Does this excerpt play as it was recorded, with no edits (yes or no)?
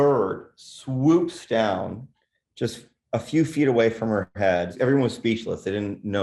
no